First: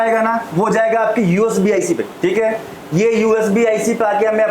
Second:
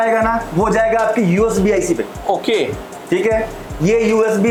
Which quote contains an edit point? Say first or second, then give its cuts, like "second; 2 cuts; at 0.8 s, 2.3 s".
first; 1 cut; at 2.1 s